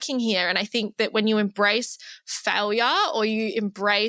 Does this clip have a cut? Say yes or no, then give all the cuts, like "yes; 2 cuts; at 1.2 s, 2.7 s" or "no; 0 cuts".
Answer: no; 0 cuts